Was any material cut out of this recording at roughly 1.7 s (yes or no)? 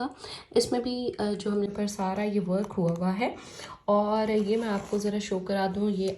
yes